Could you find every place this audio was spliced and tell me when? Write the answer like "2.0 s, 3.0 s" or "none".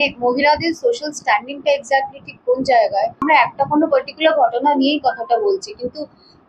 3.2 s